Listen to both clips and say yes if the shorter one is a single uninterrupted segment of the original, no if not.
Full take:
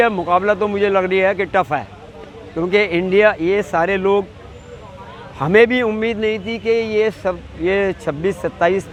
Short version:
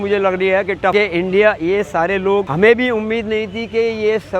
no